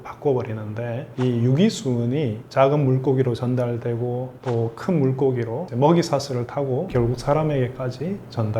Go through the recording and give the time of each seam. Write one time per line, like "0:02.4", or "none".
none